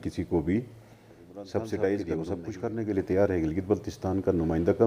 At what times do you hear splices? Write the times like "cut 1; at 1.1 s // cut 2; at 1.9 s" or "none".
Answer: cut 1; at 2.4 s

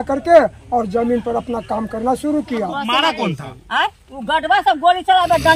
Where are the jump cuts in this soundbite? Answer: cut 1; at 2.8 s

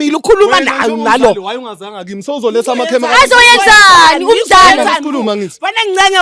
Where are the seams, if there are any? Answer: none

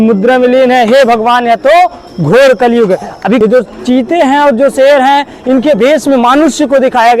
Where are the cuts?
cut 1; at 3.4 s

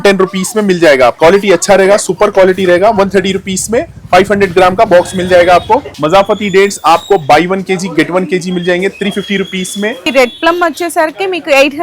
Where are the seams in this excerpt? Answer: cut 1; at 1.2 s // cut 2; at 5.9 s // cut 3; at 10.0 s

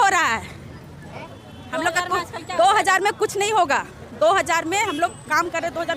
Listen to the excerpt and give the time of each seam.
none

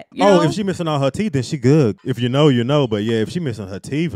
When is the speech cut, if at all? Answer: cut 1; at 2.0 s

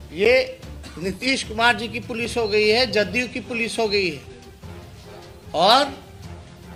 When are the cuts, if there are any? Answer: none

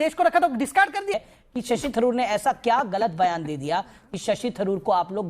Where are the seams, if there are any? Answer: cut 1; at 1.1 s

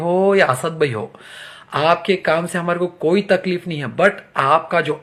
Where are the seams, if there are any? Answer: none

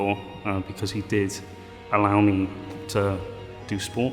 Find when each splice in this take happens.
none

